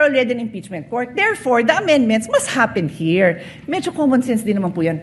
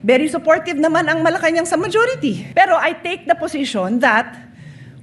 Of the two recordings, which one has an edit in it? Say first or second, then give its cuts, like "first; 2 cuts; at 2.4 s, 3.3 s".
second; 1 cut; at 2.4 s